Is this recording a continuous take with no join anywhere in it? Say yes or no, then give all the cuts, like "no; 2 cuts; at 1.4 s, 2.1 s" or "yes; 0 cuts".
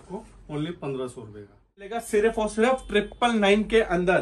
no; 1 cut; at 2.0 s